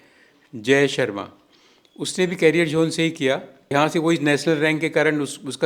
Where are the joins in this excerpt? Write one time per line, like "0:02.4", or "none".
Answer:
0:03.7